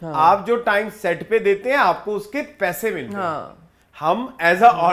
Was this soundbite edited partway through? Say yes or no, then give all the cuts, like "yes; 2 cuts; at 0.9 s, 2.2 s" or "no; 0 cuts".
no; 0 cuts